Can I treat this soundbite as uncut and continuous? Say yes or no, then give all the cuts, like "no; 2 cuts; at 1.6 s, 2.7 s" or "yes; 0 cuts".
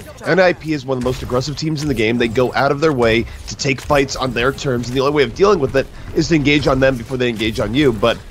yes; 0 cuts